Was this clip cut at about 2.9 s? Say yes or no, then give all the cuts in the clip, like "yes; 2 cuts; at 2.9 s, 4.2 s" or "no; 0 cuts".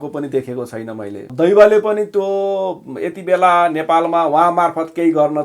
no; 1 cut; at 1.3 s